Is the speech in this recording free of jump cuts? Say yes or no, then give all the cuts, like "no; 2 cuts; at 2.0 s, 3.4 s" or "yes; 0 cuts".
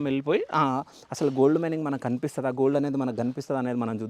no; 1 cut; at 2.2 s